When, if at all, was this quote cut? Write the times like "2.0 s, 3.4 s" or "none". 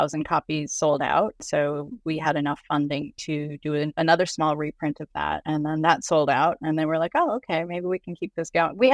1.4 s, 3.9 s, 5.4 s